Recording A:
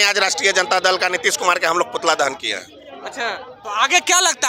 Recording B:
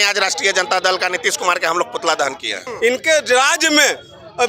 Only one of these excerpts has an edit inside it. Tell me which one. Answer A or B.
B